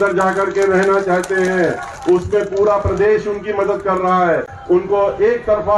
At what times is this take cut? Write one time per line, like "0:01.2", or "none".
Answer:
none

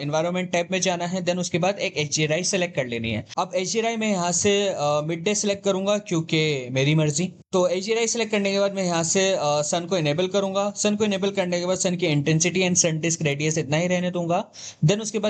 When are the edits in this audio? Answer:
none

